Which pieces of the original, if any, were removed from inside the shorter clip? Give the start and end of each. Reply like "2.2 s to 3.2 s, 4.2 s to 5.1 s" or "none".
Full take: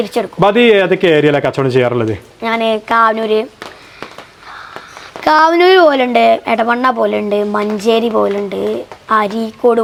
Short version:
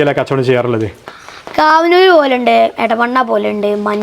2.3 s to 4.7 s